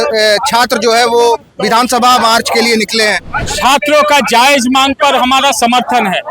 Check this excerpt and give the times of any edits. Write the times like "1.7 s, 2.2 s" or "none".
3.4 s